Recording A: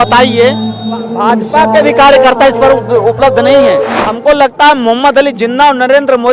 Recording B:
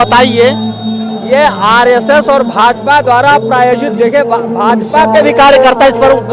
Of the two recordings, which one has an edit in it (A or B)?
A